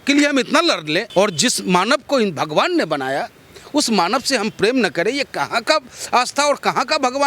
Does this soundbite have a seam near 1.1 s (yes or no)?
yes